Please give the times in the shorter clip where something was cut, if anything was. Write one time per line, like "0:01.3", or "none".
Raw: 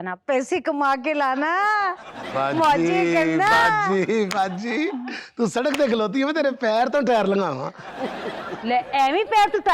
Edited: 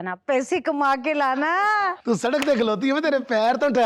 0:02.0